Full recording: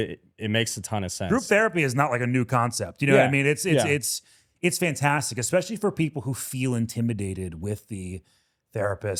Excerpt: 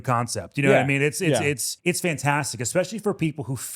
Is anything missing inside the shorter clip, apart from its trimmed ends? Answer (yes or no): yes